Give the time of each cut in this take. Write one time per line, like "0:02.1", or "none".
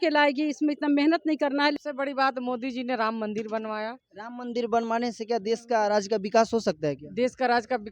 0:01.7